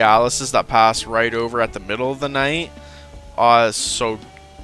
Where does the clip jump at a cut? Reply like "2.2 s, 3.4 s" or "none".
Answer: none